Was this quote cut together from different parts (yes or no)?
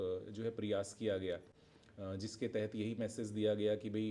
no